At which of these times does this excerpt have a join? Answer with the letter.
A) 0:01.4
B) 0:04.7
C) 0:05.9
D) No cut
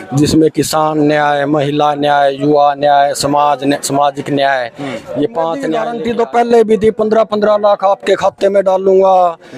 C